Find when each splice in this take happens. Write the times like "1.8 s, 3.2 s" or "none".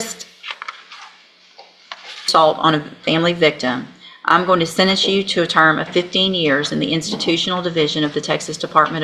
2.2 s